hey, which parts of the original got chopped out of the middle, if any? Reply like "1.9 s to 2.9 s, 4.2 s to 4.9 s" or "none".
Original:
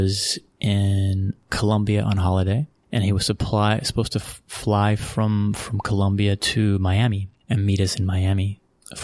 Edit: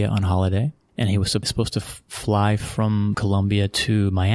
3.4 s to 3.9 s, 5.6 s to 5.9 s